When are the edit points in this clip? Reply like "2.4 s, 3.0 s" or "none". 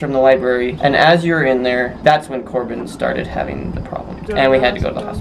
1.9 s, 4.2 s